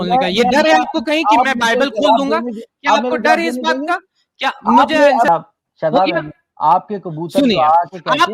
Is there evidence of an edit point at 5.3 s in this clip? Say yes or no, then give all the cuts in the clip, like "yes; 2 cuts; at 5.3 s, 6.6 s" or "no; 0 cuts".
yes; 1 cut; at 5.3 s